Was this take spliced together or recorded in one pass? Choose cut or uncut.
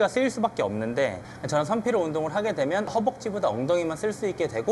cut